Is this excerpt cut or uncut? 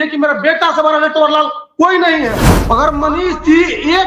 cut